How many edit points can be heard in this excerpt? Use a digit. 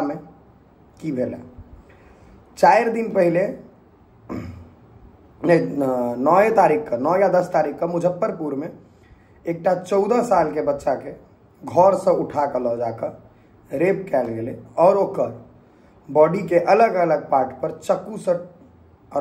0